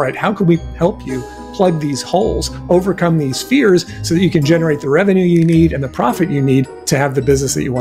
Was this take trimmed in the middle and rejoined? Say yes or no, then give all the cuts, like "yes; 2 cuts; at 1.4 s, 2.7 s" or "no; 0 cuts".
yes; 1 cut; at 6.8 s